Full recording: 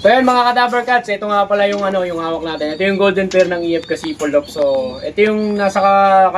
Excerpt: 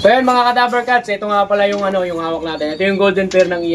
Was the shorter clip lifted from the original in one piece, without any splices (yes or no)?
yes